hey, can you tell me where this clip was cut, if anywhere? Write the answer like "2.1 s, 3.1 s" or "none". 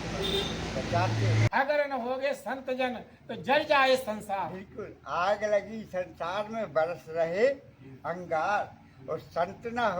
1.5 s